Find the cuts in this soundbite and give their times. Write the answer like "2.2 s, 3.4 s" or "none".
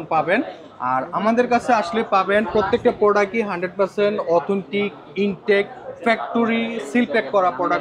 none